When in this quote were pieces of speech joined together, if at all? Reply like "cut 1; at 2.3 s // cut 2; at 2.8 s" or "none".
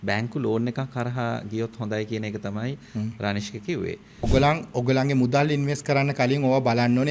cut 1; at 4.2 s